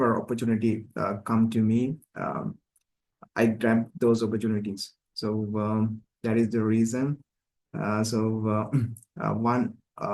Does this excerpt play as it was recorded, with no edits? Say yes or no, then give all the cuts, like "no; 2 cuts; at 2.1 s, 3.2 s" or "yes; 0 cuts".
yes; 0 cuts